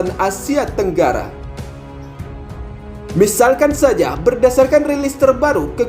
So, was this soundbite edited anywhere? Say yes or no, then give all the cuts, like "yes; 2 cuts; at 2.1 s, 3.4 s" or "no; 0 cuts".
yes; 2 cuts; at 1.3 s, 3.1 s